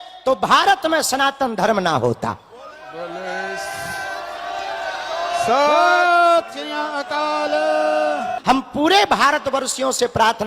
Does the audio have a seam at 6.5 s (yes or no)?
no